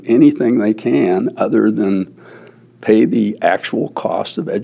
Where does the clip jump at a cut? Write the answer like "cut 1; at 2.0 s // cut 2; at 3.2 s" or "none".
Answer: none